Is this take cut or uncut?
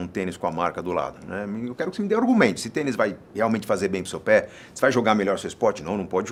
uncut